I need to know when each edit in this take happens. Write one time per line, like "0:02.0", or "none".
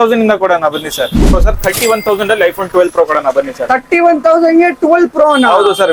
0:01.4